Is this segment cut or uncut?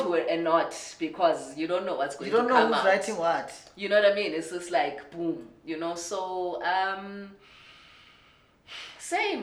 uncut